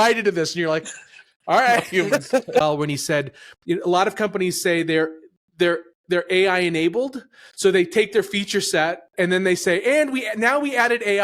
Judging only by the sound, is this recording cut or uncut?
cut